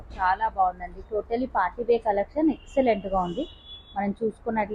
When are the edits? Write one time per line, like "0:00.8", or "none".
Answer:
none